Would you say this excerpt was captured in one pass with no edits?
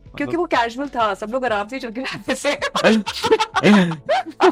yes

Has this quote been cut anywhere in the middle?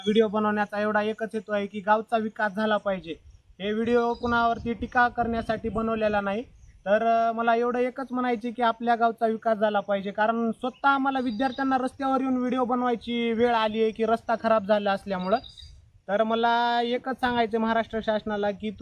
no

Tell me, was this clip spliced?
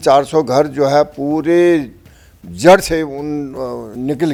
no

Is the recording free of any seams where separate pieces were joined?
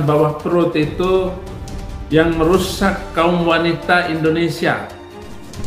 yes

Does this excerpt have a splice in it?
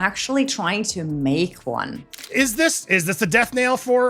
yes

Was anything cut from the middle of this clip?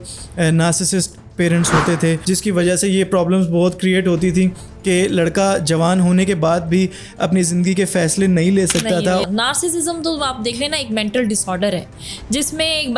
yes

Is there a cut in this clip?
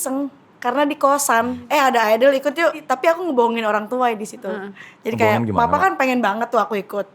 yes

